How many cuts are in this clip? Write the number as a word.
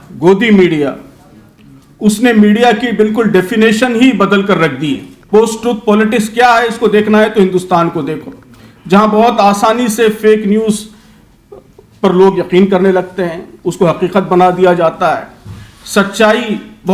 one